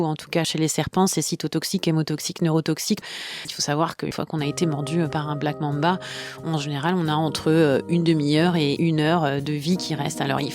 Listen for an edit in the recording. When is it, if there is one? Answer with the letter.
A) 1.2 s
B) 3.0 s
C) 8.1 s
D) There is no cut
B